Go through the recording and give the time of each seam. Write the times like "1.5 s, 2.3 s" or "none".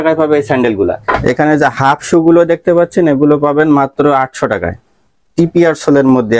1.0 s